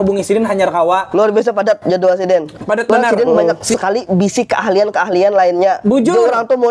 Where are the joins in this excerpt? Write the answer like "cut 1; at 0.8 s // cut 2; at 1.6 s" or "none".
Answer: cut 1; at 3.7 s